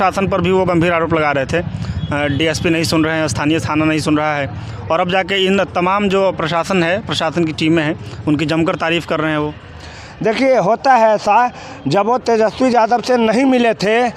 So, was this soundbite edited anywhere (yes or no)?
no